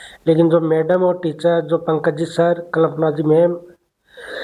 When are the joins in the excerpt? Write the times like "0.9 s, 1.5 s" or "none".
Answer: none